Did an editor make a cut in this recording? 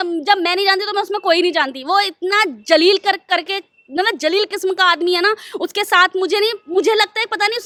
no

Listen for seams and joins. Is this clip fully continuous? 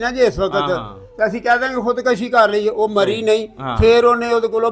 yes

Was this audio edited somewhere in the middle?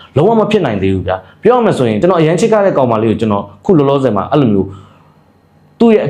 no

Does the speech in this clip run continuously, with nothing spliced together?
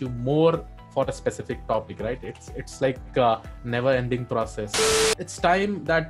no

